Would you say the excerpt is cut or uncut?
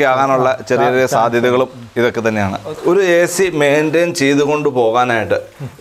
cut